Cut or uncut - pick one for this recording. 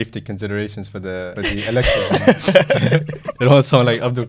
cut